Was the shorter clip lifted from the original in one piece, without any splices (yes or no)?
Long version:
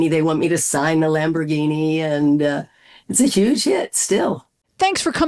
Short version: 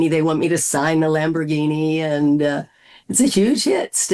yes